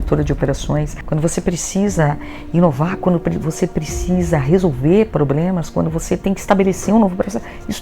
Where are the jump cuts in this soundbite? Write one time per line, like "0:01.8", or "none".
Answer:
0:01.0